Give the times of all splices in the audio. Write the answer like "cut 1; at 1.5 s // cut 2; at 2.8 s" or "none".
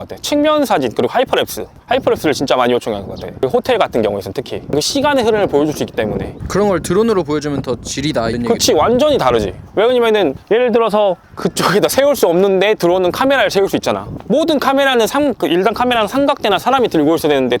none